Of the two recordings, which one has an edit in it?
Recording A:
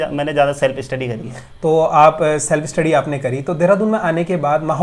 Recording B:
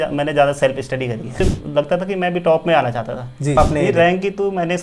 B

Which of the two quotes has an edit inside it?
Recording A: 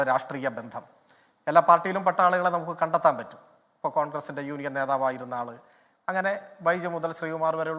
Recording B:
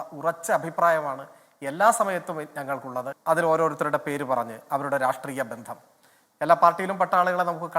B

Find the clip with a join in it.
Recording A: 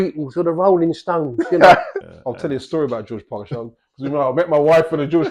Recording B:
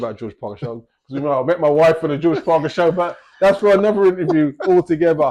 A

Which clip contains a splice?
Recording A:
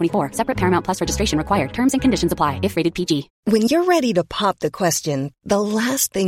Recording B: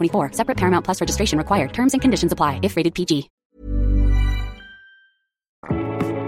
A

